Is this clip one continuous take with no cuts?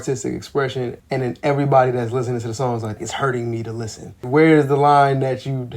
no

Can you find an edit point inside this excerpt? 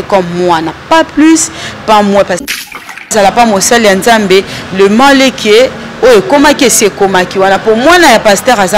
yes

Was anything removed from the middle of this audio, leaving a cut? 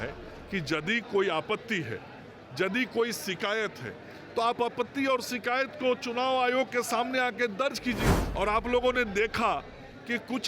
yes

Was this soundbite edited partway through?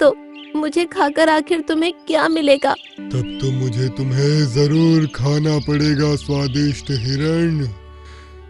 yes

